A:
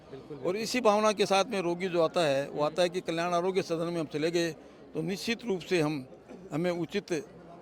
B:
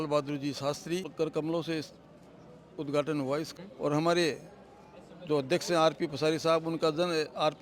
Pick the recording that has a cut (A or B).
B